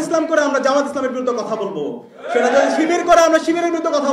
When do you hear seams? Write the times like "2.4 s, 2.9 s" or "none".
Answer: none